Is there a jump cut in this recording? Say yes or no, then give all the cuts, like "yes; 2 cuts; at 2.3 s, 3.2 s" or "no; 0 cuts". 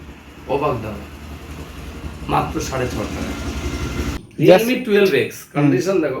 yes; 1 cut; at 4.1 s